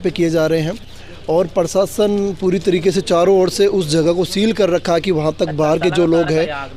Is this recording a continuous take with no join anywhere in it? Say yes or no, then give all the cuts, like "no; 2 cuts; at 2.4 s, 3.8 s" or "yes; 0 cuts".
yes; 0 cuts